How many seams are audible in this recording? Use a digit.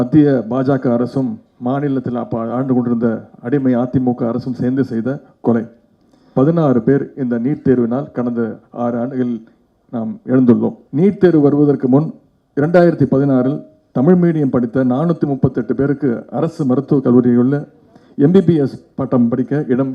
2